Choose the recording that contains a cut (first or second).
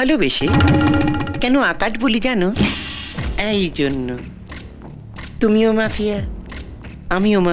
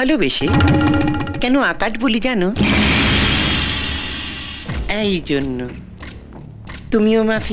first